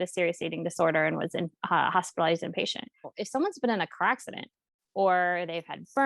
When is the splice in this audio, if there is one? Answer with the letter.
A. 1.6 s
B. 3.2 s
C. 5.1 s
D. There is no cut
B